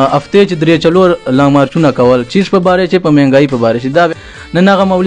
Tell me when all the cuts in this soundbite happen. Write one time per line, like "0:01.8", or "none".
0:04.1